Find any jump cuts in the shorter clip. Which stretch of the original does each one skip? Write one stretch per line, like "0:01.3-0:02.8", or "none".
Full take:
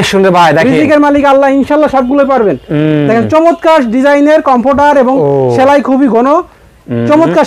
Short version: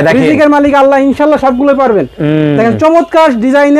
none